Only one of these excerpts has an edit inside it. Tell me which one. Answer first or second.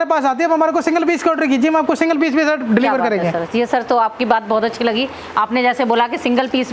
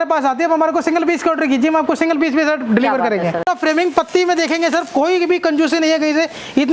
second